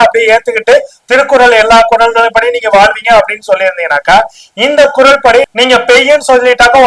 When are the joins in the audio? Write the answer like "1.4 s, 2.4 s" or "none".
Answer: 5.5 s